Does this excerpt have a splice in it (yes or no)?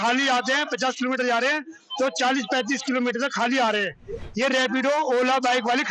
no